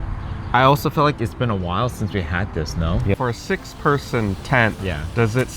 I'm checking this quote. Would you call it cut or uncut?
cut